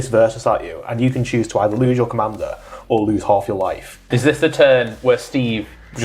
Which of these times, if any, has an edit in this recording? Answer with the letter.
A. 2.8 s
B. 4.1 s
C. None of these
B